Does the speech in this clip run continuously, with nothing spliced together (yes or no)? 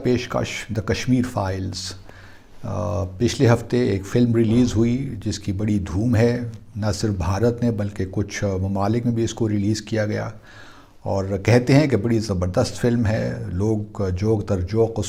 yes